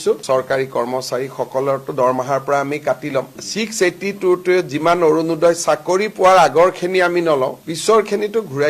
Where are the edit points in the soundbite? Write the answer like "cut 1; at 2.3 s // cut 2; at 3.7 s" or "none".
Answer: none